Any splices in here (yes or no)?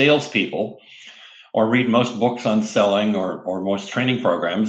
no